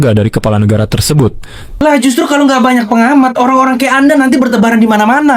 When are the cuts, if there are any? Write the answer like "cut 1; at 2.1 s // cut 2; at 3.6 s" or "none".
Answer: cut 1; at 1.7 s